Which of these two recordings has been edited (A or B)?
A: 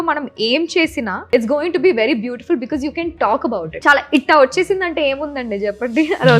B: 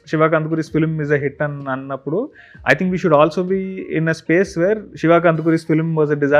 A